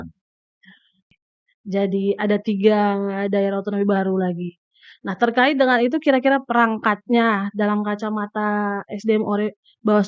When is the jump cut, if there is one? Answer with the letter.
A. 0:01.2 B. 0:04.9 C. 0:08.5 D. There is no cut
A